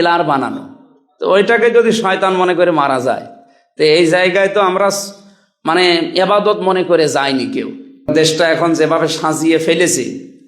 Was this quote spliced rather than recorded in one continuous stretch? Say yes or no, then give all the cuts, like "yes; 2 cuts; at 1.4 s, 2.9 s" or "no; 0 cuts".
yes; 1 cut; at 8.1 s